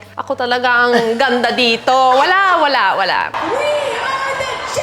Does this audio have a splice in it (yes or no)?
yes